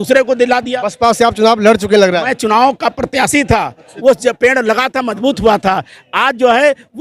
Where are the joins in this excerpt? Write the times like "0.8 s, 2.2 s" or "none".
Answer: 3.9 s

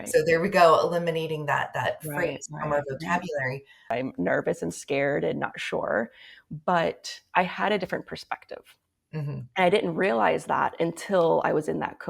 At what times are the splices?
3.9 s

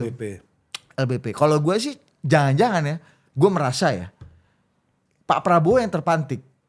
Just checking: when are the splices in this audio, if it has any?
none

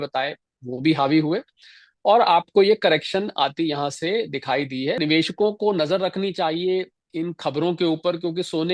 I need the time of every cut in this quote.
5.0 s

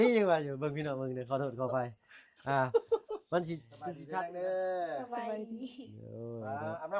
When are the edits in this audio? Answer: 4.0 s

